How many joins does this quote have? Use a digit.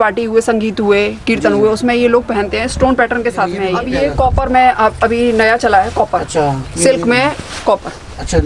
1